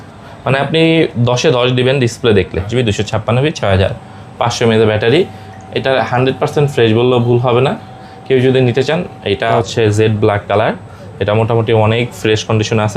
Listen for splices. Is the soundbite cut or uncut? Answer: cut